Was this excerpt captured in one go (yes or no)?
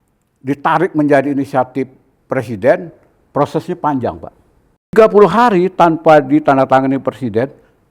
no